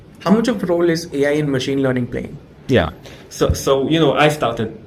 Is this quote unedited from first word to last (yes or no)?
yes